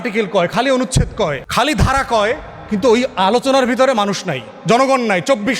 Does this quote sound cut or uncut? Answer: cut